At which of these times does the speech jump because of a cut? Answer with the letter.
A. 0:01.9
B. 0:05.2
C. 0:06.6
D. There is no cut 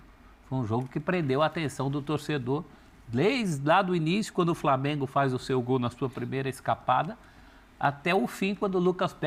D